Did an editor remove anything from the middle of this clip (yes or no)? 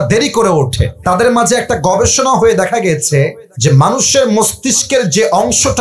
yes